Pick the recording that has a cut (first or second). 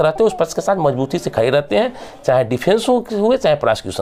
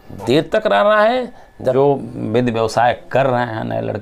second